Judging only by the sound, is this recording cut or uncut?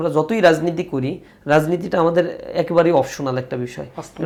uncut